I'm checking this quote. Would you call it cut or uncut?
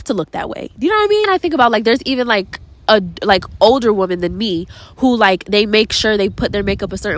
uncut